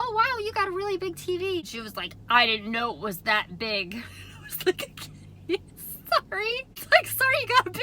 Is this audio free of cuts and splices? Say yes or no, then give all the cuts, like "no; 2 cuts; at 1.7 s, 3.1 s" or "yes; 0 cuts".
no; 2 cuts; at 1.8 s, 6.8 s